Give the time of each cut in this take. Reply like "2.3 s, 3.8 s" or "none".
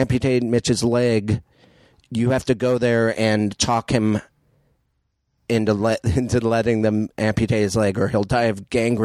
none